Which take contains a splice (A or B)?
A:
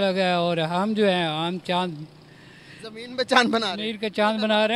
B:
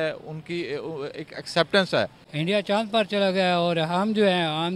B